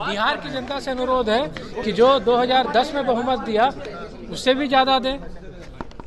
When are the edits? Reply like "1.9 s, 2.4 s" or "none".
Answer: none